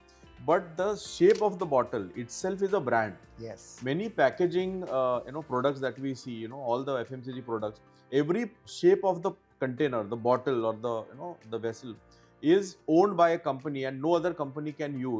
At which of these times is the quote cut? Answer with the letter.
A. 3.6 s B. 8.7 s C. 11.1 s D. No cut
B